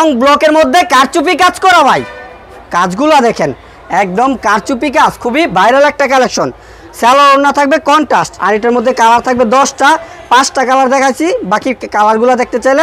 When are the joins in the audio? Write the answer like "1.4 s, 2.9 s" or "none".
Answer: 8.3 s